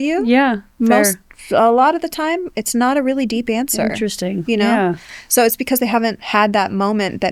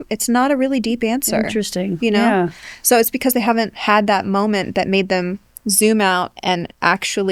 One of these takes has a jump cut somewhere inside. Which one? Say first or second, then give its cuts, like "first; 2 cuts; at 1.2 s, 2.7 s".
second; 1 cut; at 6.3 s